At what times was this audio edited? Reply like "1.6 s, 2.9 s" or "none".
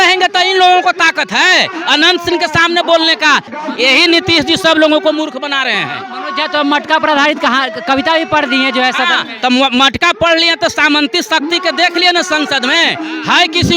3.5 s